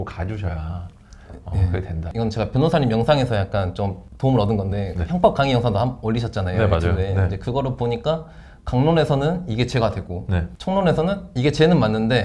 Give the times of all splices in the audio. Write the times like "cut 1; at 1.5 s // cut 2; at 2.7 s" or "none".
cut 1; at 2.1 s // cut 2; at 4.0 s // cut 3; at 10.5 s

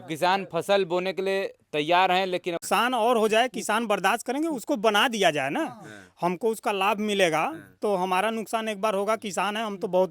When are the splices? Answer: cut 1; at 2.6 s

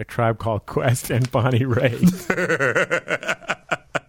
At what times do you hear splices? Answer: none

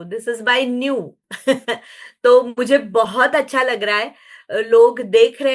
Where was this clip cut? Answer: none

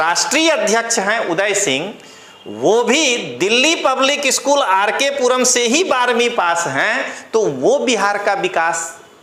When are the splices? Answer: none

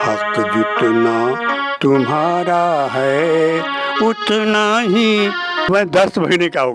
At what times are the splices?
cut 1; at 5.7 s

